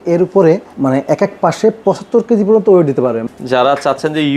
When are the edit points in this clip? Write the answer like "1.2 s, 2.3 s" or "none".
3.2 s